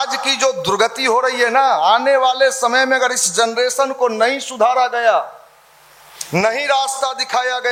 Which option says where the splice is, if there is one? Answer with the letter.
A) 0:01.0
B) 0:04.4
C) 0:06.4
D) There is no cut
D